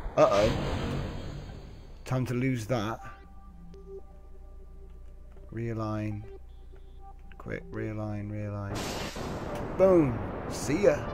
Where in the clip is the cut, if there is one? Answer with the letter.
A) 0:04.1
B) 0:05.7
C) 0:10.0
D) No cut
D